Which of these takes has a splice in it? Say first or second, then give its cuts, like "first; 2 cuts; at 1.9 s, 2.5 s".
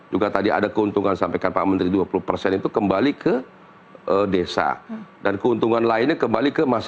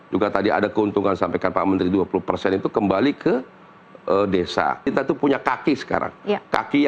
second; 1 cut; at 4.9 s